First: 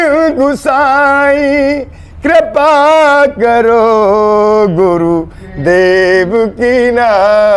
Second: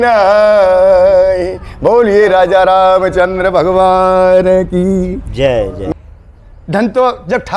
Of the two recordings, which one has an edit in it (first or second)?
second